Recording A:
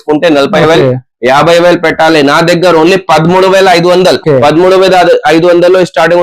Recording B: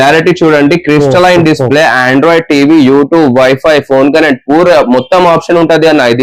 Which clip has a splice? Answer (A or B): A